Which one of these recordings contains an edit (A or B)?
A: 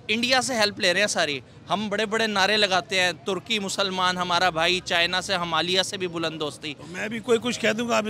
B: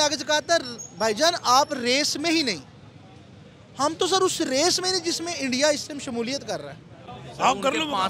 B